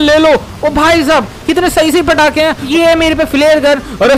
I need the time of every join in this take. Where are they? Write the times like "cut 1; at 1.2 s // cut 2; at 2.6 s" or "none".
cut 1; at 2.7 s